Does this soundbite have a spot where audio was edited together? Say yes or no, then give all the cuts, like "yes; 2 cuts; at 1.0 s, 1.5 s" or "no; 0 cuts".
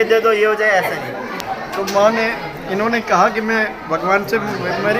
yes; 1 cut; at 1.4 s